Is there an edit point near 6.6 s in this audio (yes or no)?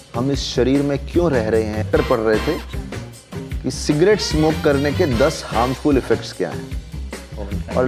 no